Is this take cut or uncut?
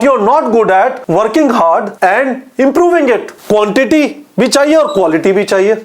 cut